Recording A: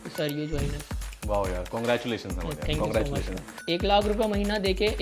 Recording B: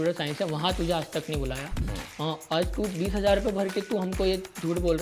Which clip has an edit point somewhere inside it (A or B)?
A